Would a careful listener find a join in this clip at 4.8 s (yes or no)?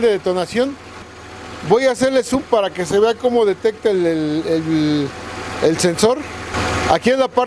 no